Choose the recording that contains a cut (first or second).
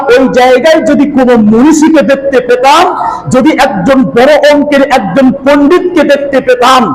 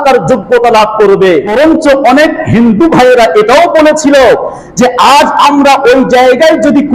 second